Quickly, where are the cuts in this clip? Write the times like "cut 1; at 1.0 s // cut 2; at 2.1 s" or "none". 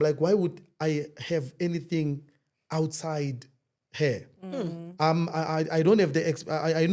none